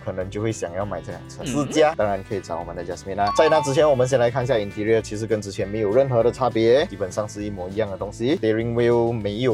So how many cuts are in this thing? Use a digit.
0